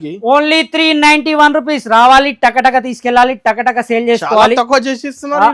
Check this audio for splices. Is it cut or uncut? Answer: uncut